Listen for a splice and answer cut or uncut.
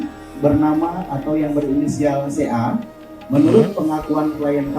uncut